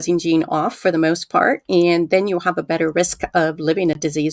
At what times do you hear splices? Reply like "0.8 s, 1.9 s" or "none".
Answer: none